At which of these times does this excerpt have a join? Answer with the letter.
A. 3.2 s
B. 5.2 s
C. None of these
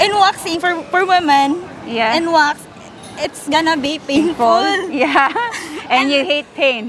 C